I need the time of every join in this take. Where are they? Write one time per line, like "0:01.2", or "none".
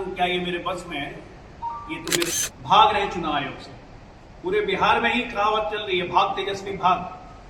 0:02.4